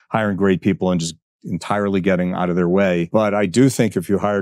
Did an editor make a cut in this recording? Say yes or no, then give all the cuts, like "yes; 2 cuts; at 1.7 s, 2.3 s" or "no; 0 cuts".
yes; 1 cut; at 3.1 s